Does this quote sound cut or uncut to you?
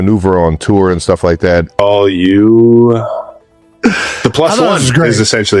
cut